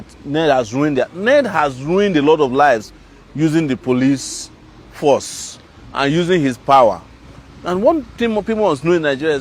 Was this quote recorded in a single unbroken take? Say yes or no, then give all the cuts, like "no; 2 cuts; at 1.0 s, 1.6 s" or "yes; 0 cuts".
yes; 0 cuts